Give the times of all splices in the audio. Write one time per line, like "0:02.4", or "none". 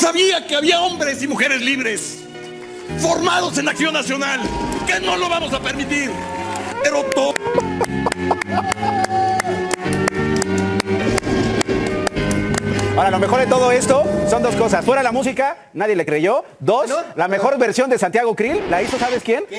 none